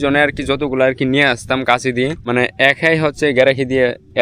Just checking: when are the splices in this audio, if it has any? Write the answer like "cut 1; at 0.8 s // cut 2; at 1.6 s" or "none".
cut 1; at 2.2 s